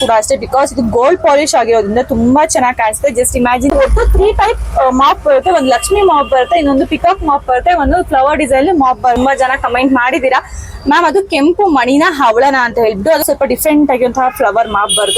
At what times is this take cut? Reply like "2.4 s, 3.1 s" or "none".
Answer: 3.7 s, 9.2 s, 13.2 s

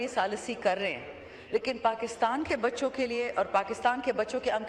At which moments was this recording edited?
none

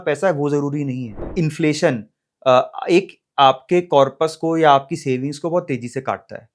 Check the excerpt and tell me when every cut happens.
1.3 s

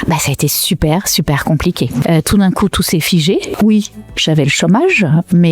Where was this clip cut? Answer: 2.0 s, 3.5 s

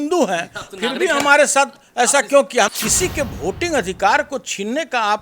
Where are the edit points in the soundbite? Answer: 2.7 s

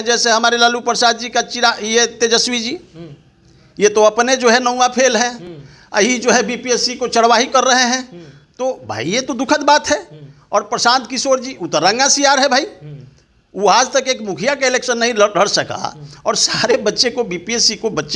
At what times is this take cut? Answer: none

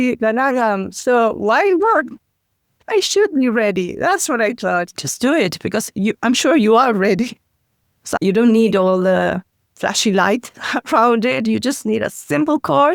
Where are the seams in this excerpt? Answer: 4.9 s, 8.0 s

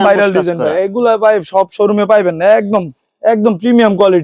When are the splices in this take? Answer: none

